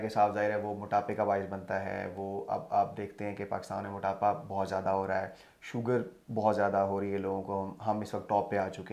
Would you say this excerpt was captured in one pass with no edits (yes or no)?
yes